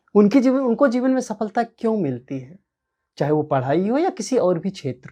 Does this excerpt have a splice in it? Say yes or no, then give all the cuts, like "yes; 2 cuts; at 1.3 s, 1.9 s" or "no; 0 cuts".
no; 0 cuts